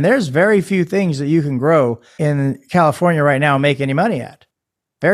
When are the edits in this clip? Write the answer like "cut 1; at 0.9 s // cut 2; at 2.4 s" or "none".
cut 1; at 2.1 s